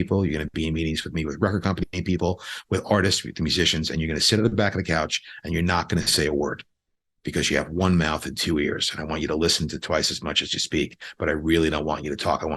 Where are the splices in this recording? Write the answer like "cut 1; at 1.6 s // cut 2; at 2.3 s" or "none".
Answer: none

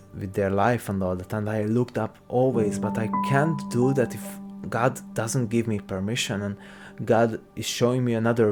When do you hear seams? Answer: none

